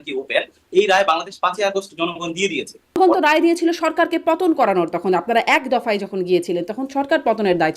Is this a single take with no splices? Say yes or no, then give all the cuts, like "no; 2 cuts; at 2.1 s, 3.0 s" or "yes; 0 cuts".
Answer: no; 1 cut; at 3.0 s